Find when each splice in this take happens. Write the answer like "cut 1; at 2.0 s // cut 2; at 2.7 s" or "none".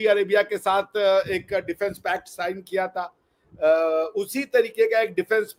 none